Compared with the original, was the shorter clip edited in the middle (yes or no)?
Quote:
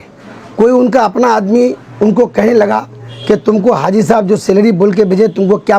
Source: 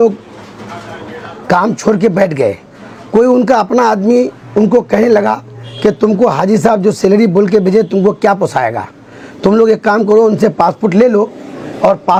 no